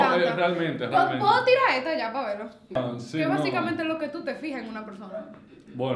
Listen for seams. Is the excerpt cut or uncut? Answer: cut